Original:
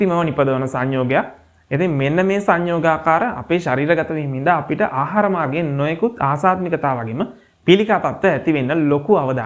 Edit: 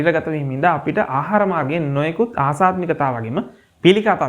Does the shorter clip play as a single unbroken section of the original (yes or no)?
yes